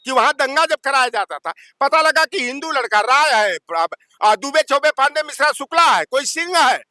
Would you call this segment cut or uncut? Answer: uncut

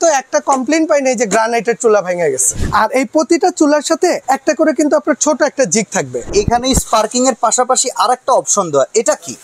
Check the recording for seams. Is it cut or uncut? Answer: cut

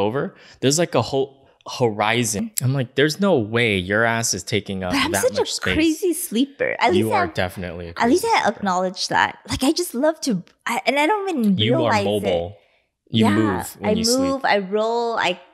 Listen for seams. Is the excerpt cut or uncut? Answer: cut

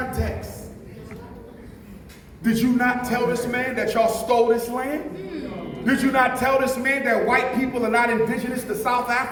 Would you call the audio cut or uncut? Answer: uncut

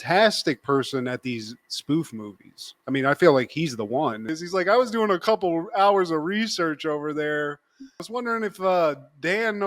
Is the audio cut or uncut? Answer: cut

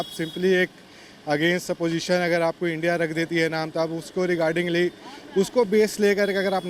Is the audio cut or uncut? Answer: uncut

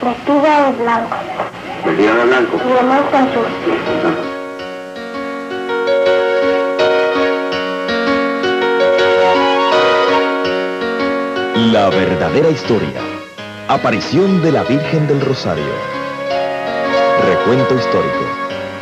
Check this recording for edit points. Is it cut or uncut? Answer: cut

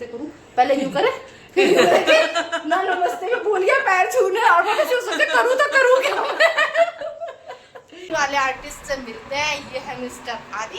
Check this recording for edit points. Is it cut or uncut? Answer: cut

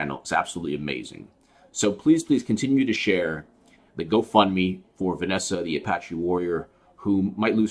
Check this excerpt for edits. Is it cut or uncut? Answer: uncut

